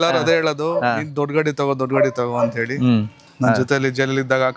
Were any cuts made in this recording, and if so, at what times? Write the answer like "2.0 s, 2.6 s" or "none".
3.3 s